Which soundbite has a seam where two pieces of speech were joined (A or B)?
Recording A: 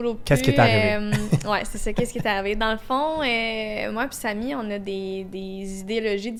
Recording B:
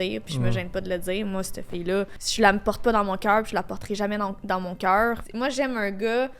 B